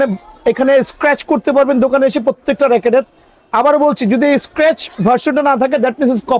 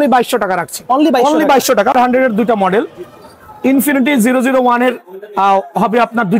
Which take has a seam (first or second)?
second